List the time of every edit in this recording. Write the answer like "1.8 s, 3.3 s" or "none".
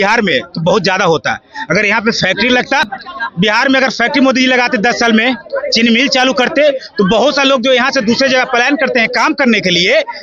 none